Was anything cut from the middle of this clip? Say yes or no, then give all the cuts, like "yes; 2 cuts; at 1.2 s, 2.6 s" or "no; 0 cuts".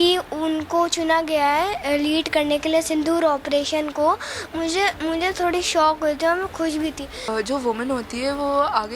yes; 1 cut; at 7.3 s